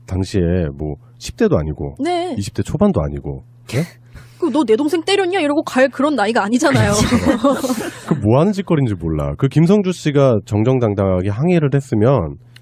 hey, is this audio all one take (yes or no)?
yes